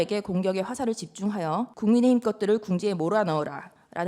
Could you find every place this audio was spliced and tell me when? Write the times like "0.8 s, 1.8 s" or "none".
1.7 s